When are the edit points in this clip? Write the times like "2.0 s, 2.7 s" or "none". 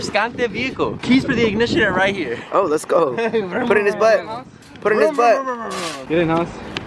none